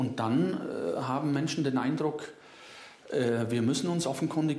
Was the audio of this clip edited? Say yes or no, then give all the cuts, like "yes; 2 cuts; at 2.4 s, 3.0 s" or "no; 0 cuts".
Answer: no; 0 cuts